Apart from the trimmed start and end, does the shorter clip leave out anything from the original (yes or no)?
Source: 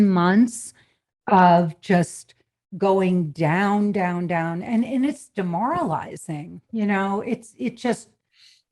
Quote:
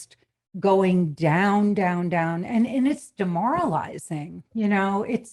no